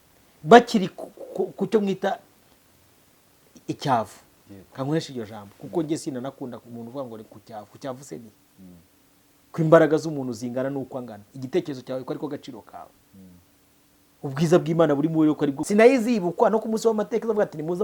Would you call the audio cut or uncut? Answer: cut